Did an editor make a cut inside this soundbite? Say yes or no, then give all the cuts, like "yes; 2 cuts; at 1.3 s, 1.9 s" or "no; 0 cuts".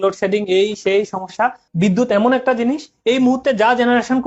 yes; 1 cut; at 1.6 s